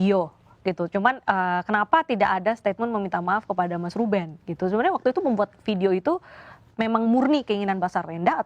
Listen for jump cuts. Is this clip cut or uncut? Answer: uncut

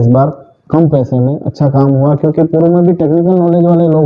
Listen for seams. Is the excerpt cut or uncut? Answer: uncut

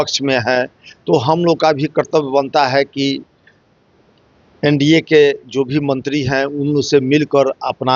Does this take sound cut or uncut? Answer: uncut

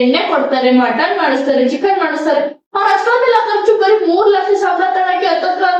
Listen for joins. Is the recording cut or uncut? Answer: uncut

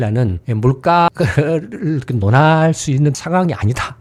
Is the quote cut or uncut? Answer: uncut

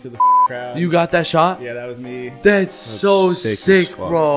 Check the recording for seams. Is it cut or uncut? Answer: uncut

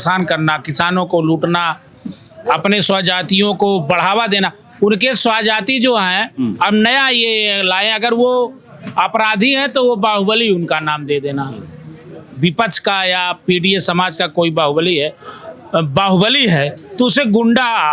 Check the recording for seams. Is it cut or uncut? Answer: uncut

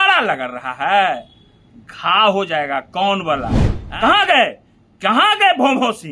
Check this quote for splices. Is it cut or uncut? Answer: cut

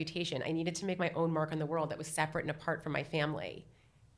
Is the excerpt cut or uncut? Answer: uncut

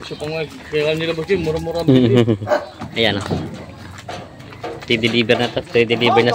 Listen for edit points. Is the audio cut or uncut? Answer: cut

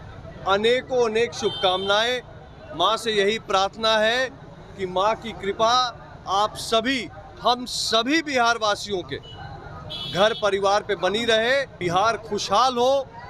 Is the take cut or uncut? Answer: cut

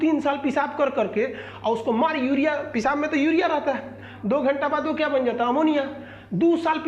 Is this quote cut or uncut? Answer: uncut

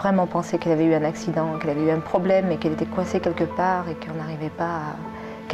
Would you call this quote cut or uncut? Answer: uncut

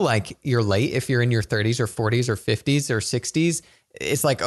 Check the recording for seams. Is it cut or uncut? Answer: uncut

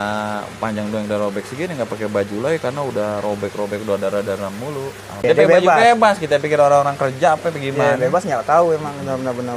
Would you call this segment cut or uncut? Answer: cut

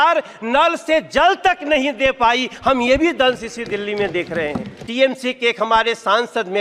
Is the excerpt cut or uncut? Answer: cut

